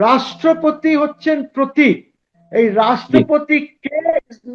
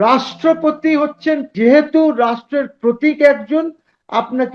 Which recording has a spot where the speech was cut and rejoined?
second; 1 cut; at 1.5 s

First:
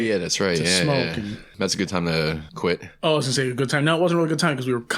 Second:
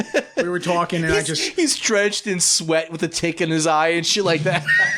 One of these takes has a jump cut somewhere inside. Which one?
first; 2 cuts; at 1.5 s, 2.5 s

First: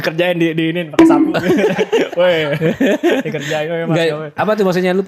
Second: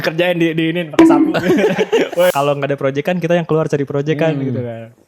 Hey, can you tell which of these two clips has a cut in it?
second; 1 cut; at 2.3 s

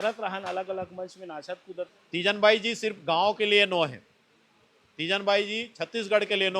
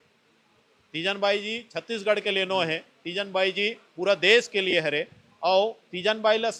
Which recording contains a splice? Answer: first; 1 cut; at 1.9 s

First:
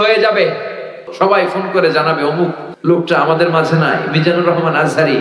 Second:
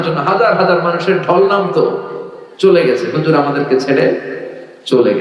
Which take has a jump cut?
first; 2 cuts; at 1.0 s, 2.7 s

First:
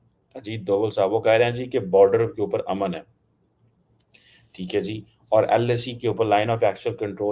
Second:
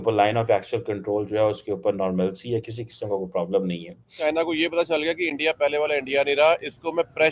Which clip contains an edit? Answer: second; 1 cut; at 4.2 s

